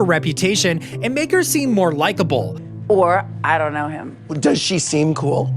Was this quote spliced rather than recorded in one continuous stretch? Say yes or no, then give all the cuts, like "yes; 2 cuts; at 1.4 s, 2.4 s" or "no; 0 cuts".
yes; 1 cut; at 2.6 s